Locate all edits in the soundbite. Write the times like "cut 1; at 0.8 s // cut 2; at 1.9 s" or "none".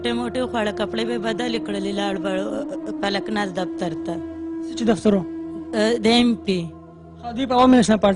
cut 1; at 5.1 s